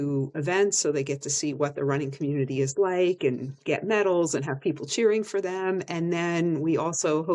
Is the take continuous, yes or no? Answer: yes